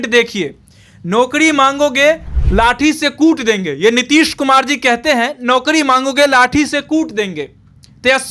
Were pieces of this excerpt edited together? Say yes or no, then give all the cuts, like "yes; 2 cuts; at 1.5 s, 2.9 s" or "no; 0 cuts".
yes; 1 cut; at 2.3 s